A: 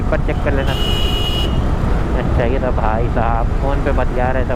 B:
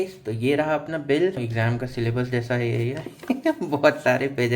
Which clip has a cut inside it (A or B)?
B